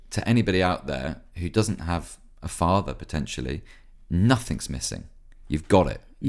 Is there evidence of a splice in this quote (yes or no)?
no